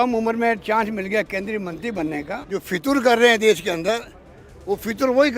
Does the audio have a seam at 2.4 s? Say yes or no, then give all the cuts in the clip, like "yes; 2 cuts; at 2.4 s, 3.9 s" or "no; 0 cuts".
yes; 1 cut; at 2.4 s